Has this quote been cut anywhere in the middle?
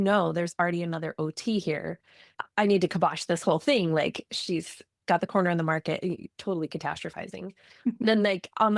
yes; 1 cut; at 2.3 s

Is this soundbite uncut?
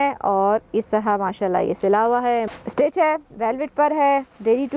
no; 1 cut; at 2.5 s

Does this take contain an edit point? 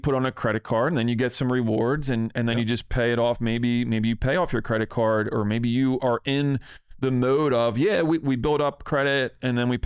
no; 0 cuts

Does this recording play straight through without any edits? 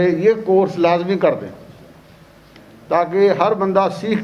yes; 0 cuts

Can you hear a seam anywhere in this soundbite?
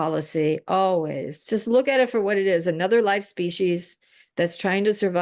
no; 0 cuts

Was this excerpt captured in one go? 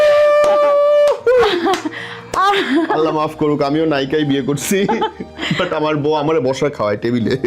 yes; 0 cuts

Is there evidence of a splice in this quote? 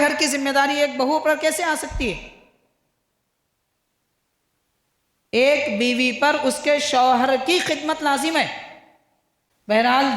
no; 0 cuts

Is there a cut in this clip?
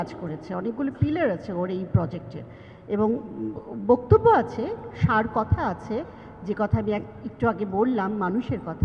no; 0 cuts

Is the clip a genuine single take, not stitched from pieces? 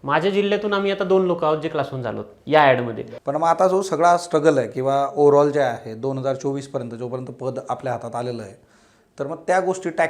no; 1 cut; at 3.0 s

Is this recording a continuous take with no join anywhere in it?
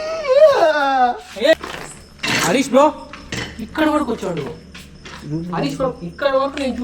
no; 1 cut; at 1.5 s

